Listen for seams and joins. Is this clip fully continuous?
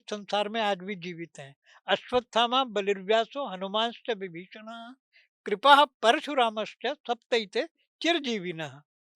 yes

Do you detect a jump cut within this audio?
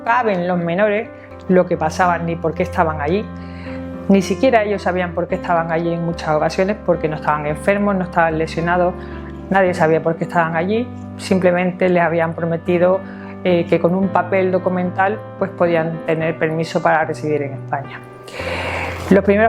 yes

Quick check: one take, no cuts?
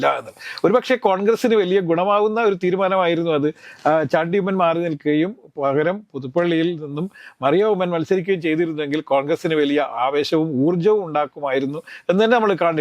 yes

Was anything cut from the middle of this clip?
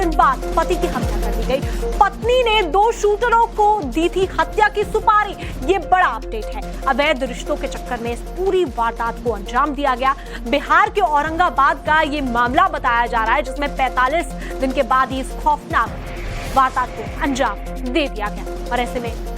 yes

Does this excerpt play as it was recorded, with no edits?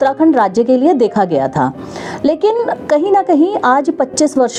yes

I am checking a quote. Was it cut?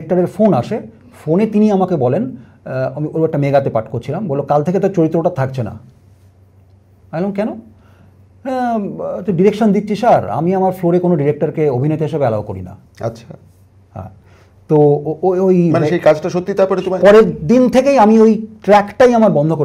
no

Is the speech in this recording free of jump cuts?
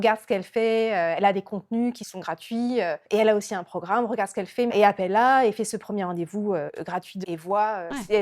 no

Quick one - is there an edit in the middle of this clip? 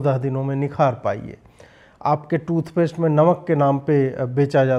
no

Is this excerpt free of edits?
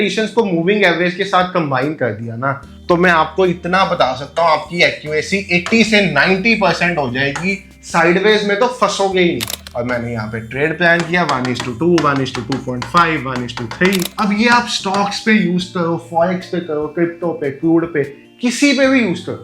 no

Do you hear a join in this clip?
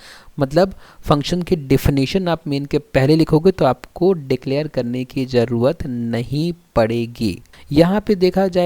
yes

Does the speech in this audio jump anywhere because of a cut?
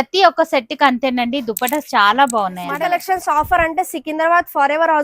yes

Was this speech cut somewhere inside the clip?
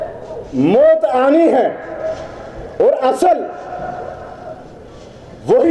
no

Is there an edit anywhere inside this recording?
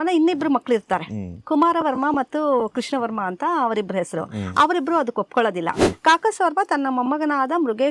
yes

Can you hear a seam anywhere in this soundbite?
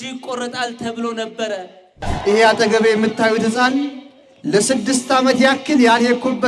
yes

